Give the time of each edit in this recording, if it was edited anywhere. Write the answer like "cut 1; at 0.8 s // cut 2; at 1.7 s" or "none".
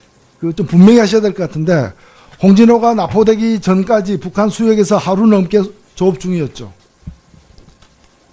cut 1; at 1.8 s